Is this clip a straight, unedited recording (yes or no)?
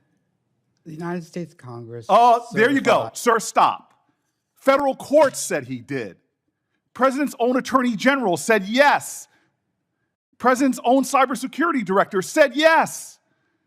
yes